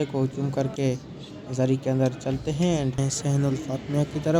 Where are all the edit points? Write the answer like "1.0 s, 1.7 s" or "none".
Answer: 3.0 s